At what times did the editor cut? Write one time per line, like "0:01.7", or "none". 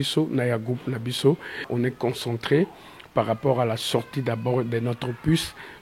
0:01.7